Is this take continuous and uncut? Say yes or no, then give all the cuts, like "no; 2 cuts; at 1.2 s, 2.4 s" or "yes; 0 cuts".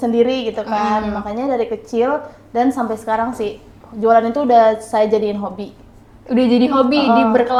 yes; 0 cuts